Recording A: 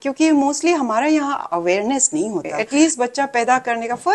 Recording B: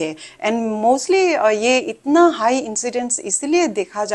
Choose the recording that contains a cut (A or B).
A